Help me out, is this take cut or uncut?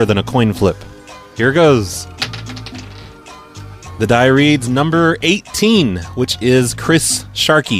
cut